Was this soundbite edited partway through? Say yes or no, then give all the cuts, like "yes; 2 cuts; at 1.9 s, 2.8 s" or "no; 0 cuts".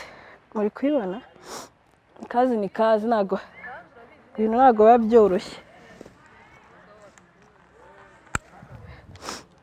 no; 0 cuts